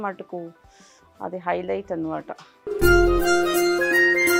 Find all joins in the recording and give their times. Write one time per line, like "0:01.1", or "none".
none